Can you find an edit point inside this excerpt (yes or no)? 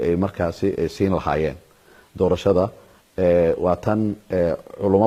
no